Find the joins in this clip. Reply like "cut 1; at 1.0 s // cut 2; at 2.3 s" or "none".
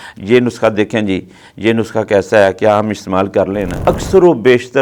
cut 1; at 3.7 s